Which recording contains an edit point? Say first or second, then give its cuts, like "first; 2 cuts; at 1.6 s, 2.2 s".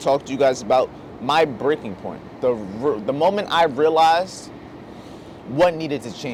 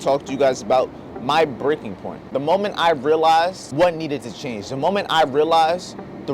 second; 2 cuts; at 2.3 s, 3.6 s